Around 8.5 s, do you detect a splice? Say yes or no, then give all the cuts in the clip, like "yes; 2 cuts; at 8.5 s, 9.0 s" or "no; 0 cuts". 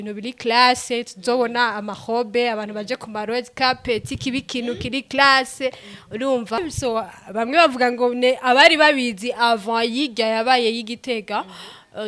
no; 1 cut; at 6.7 s